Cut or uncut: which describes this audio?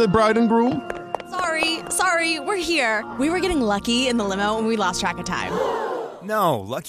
uncut